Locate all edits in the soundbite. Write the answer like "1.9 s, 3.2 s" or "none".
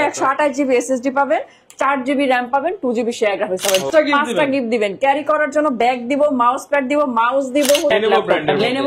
3.9 s, 7.9 s